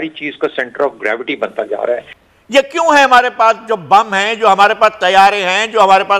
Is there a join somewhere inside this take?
yes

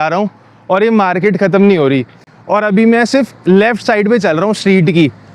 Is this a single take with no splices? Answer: yes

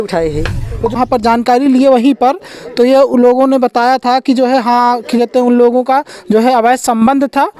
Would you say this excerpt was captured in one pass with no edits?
no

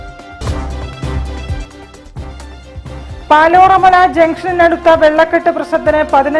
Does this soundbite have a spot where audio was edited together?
yes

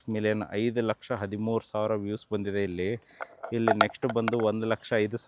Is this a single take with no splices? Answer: yes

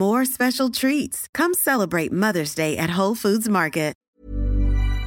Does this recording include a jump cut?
yes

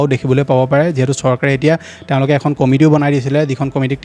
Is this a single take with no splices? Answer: yes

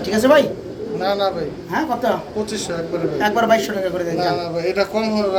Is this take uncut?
yes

